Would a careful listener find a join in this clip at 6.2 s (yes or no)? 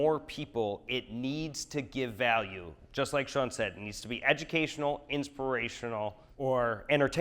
yes